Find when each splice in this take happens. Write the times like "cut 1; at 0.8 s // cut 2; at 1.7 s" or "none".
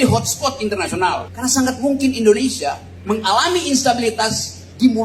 cut 1; at 1.3 s // cut 2; at 2.9 s